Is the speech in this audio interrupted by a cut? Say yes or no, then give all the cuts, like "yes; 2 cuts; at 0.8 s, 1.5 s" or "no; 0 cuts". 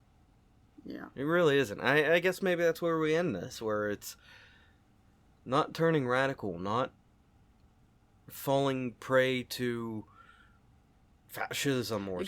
yes; 1 cut; at 5.3 s